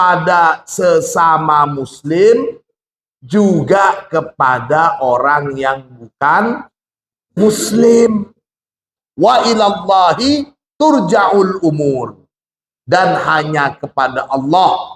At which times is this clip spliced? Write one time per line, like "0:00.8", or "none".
0:09.0